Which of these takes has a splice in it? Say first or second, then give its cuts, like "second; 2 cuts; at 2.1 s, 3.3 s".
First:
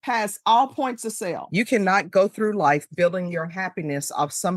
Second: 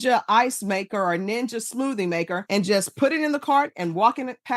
first; 1 cut; at 1.4 s